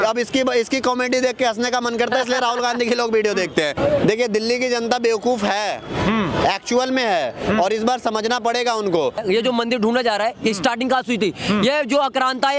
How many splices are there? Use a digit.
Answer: 2